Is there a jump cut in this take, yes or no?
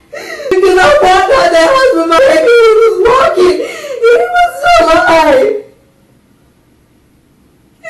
no